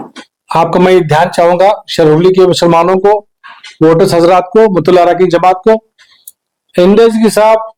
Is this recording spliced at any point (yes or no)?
no